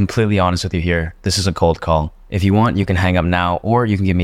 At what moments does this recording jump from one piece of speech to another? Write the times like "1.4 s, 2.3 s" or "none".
2.2 s